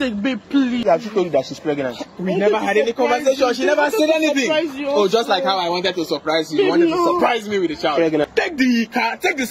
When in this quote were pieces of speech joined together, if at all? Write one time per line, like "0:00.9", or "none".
0:00.8
0:08.2